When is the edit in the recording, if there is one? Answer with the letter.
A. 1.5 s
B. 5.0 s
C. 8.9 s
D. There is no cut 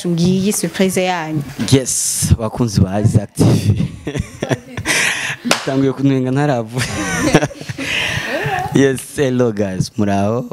A